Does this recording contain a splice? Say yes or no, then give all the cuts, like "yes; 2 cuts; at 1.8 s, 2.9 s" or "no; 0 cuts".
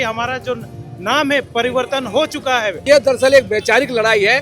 yes; 1 cut; at 2.7 s